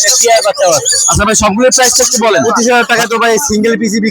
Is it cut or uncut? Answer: cut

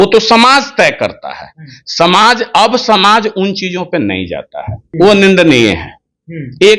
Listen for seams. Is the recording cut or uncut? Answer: cut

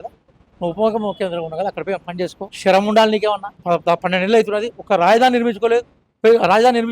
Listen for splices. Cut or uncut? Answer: cut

